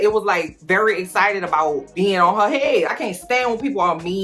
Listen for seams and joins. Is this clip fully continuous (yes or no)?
no